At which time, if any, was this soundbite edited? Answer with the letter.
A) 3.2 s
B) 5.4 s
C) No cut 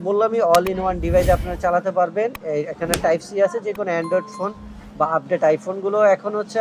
C